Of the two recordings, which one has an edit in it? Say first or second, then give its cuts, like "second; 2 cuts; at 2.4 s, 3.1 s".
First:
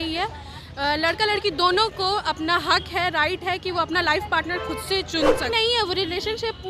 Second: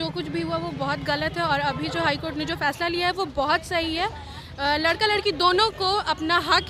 first; 1 cut; at 5.5 s